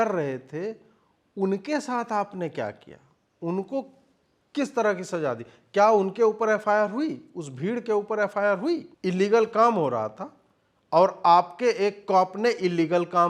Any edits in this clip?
yes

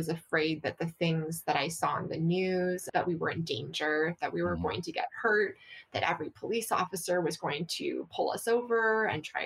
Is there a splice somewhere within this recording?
yes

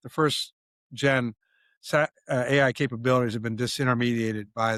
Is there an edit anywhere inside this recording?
no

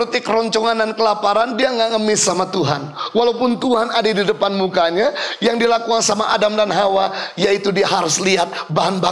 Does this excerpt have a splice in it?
no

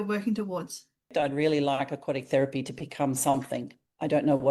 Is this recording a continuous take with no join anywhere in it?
no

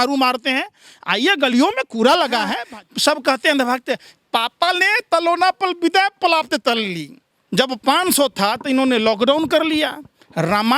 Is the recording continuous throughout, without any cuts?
no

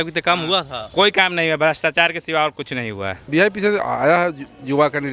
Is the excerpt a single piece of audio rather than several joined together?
no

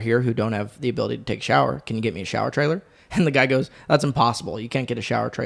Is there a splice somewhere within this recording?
no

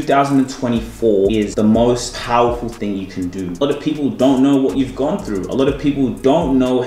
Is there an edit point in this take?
yes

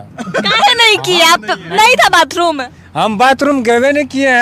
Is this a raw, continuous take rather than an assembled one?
yes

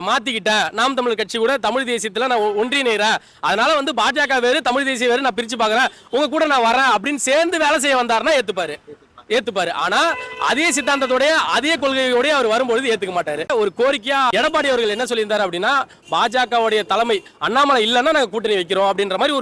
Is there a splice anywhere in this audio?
yes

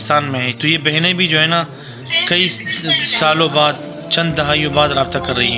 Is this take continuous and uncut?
yes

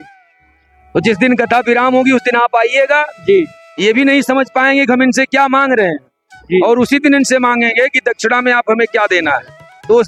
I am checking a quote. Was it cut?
no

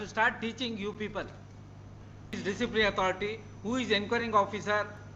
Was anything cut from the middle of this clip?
yes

